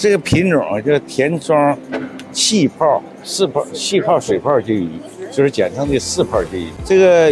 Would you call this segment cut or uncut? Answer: uncut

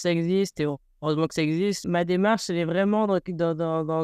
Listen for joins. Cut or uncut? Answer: cut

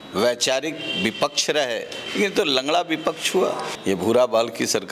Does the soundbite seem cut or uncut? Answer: cut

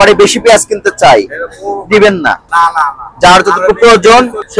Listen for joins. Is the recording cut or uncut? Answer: uncut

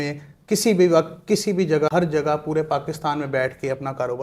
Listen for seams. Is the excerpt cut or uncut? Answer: cut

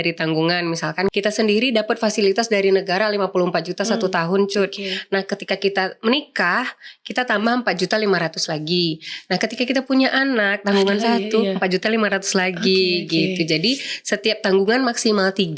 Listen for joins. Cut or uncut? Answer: cut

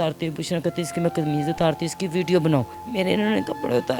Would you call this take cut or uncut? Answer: cut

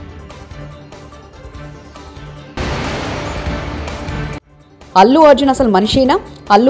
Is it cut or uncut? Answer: cut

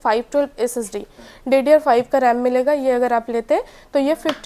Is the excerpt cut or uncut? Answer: uncut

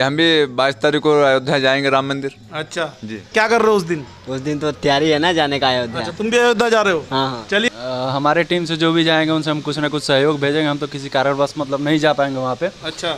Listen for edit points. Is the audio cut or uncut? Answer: cut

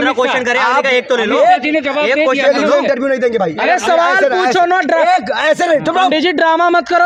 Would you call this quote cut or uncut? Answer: uncut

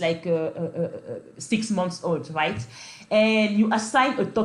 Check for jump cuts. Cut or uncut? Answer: uncut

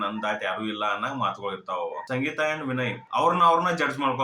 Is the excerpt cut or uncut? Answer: cut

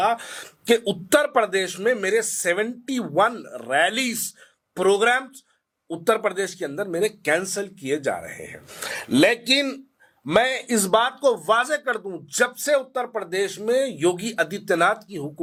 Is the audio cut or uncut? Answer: uncut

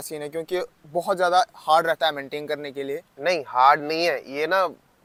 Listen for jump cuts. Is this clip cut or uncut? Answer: uncut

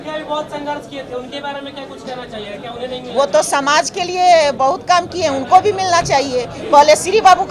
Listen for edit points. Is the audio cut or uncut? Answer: uncut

